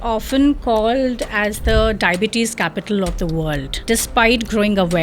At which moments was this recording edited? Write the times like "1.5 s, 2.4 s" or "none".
3.8 s